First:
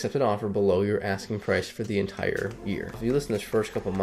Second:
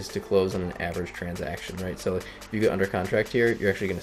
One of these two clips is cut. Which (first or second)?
first